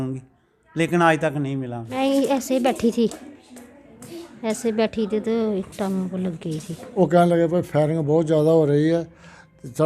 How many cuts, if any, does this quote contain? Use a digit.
2